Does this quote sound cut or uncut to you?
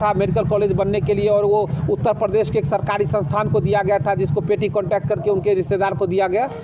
uncut